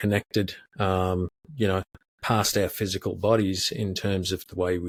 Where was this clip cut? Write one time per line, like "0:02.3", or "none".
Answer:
none